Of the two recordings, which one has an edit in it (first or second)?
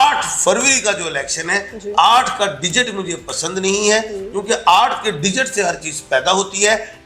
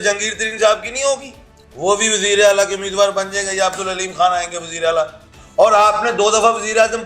second